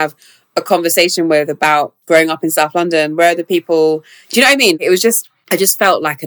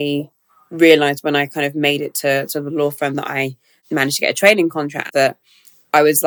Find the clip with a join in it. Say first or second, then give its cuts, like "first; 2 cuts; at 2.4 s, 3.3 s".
first; 2 cuts; at 2.0 s, 5.3 s